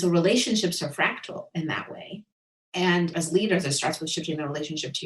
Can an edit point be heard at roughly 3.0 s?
yes; 1 cut; at 3.0 s

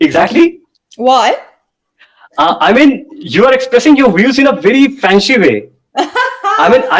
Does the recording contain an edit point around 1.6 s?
no; 0 cuts

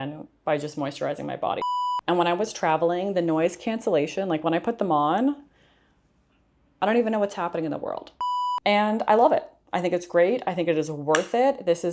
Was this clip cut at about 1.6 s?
yes; 2 cuts; at 1.6 s, 8.4 s

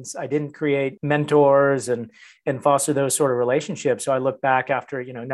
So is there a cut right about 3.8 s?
no; 1 cut; at 1.0 s

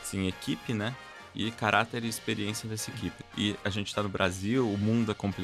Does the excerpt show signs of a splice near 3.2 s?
yes; 1 cut; at 3.2 s

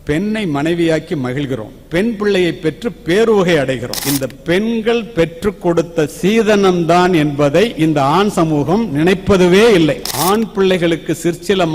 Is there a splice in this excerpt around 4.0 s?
yes; 2 cuts; at 4.0 s, 10.1 s

